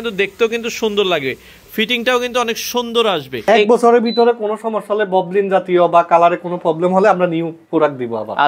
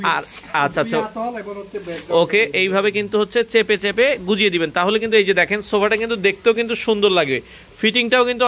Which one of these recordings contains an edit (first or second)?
first